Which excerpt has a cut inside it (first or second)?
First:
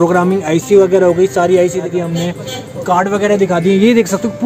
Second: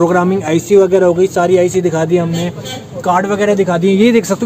first